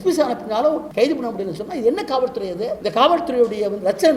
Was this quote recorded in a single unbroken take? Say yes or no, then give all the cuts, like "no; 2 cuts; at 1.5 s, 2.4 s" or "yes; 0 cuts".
no; 2 cuts; at 0.9 s, 2.8 s